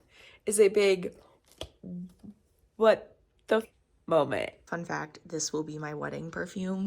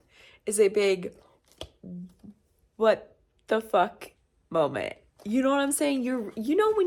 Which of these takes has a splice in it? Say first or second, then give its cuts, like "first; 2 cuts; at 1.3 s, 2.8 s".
first; 2 cuts; at 3.7 s, 4.7 s